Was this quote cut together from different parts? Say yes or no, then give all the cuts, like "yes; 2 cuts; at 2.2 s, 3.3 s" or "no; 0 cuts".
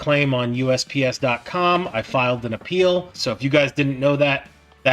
yes; 1 cut; at 3.1 s